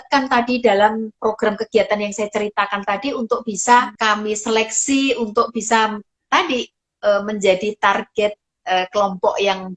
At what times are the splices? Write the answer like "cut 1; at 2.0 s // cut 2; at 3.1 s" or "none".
cut 1; at 1.2 s // cut 2; at 3.9 s

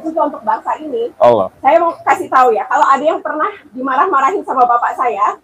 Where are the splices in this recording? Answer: cut 1; at 1.5 s

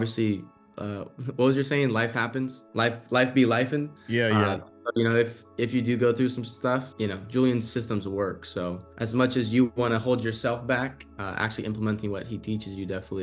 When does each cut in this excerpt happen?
cut 1; at 2.6 s // cut 2; at 5.4 s // cut 3; at 6.9 s // cut 4; at 8.9 s

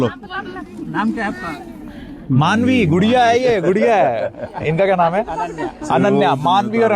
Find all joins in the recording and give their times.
none

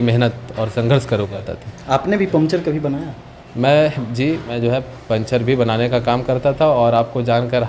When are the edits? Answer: cut 1; at 1.5 s // cut 2; at 4.5 s

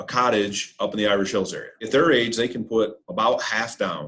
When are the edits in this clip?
cut 1; at 1.8 s

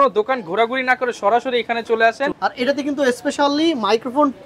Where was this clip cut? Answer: cut 1; at 2.3 s

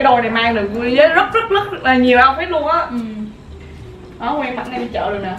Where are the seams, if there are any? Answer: cut 1; at 3.5 s

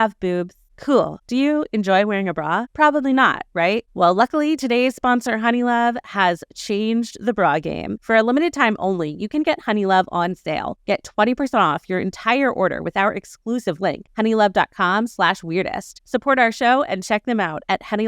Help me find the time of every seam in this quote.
cut 1; at 1.2 s // cut 2; at 3.9 s // cut 3; at 7.9 s

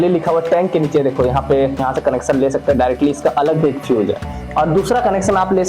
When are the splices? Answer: cut 1; at 1.8 s

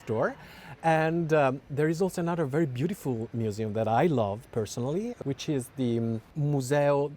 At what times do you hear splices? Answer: cut 1; at 5.1 s // cut 2; at 6.3 s

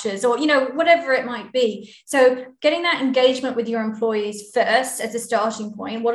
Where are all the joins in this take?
none

